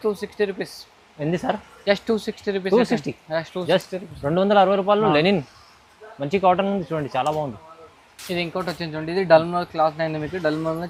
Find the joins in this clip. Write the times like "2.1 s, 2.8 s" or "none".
none